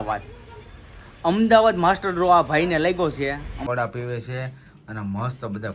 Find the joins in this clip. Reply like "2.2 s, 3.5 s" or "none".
3.6 s